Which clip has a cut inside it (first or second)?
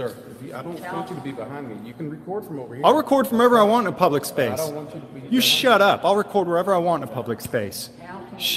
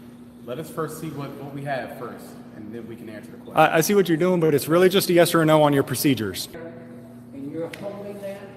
second